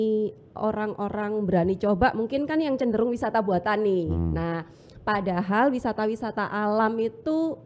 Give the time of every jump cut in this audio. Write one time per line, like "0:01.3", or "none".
none